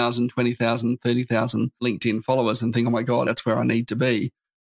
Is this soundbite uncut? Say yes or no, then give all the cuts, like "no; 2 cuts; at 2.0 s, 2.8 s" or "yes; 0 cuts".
no; 2 cuts; at 1.8 s, 3.2 s